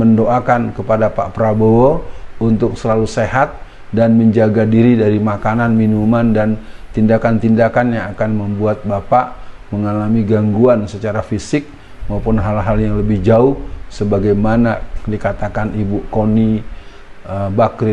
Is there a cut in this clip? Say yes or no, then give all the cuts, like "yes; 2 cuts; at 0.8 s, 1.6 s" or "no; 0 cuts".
no; 0 cuts